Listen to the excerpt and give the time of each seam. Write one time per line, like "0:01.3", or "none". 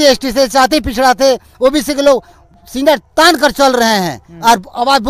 none

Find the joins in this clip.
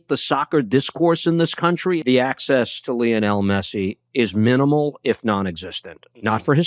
0:02.0

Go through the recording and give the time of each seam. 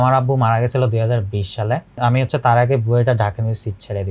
0:01.9

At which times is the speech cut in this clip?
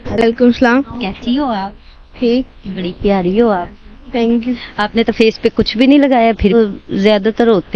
0:06.5

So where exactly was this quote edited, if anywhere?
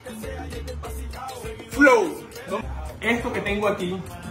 0:02.6

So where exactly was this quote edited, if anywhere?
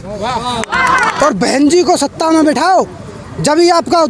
0:01.1

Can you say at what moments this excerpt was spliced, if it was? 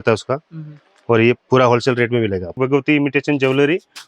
0:01.4
0:02.5

